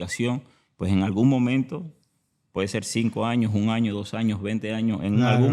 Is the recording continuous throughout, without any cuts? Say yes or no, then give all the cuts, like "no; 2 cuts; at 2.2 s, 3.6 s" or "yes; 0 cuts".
yes; 0 cuts